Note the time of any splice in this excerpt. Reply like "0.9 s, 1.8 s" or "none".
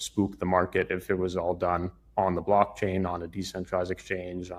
none